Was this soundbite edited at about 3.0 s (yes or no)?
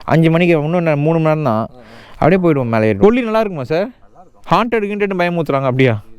yes